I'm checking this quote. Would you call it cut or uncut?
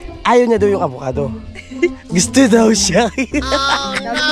uncut